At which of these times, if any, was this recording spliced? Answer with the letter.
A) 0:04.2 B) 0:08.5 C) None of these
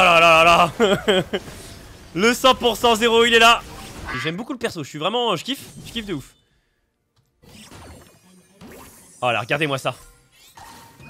A